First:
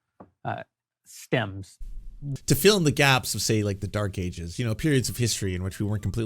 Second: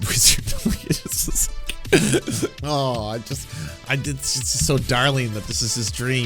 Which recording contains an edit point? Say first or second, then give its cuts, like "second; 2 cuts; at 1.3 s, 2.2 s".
first; 1 cut; at 2.2 s